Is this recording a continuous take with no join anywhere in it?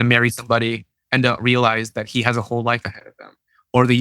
no; 1 cut; at 0.9 s

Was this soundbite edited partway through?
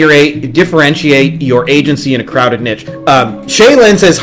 yes; 1 cut; at 2.9 s

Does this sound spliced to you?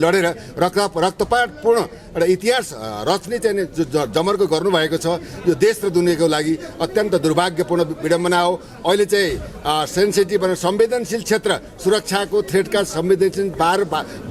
no; 0 cuts

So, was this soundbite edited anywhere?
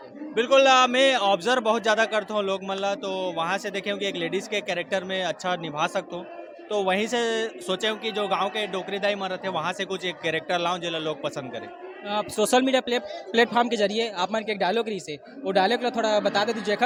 no; 0 cuts

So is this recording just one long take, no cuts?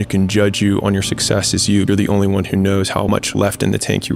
no; 2 cuts; at 1.9 s, 3.1 s

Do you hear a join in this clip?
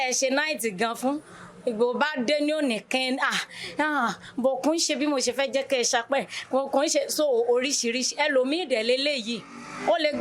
no; 0 cuts

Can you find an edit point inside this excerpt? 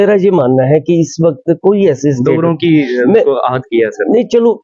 no; 0 cuts

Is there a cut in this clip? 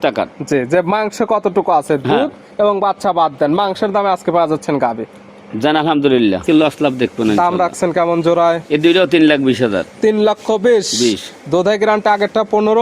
yes; 1 cut; at 6.4 s

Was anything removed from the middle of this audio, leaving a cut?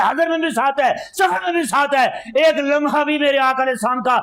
no; 0 cuts

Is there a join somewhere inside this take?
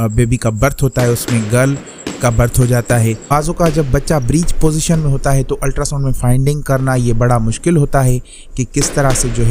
yes; 1 cut; at 3.2 s

